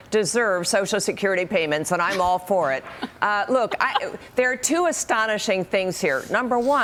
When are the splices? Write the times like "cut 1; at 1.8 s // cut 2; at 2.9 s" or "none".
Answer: none